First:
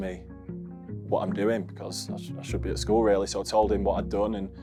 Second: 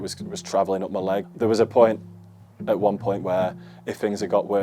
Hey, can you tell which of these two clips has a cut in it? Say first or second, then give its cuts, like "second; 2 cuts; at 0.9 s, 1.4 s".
second; 1 cut; at 1.3 s